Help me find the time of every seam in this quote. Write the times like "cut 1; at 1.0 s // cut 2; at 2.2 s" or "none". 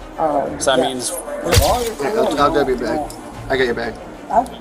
cut 1; at 1.5 s